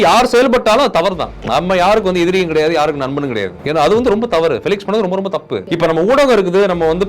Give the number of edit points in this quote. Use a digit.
3